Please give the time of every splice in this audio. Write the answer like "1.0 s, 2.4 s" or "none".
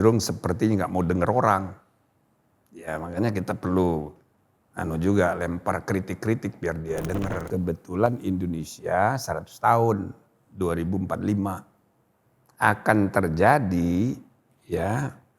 7.4 s